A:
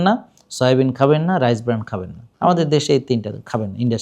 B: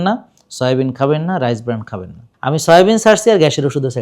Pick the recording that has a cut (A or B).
B